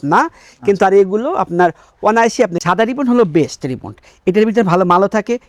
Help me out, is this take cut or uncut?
uncut